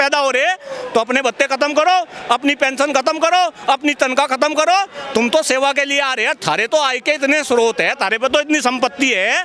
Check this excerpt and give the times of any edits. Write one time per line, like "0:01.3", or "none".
none

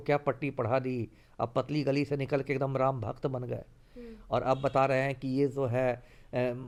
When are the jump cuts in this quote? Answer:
none

